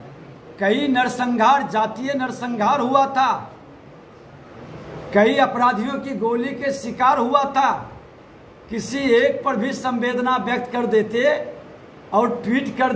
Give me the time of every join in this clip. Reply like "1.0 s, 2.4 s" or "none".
none